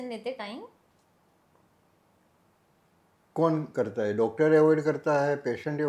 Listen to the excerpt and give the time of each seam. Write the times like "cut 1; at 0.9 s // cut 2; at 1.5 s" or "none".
none